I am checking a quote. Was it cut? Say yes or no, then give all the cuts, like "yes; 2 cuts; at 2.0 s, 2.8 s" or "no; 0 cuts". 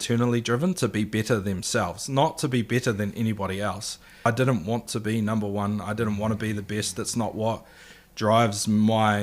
yes; 1 cut; at 4.2 s